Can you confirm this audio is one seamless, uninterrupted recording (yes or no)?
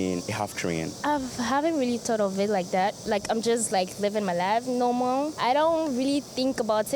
yes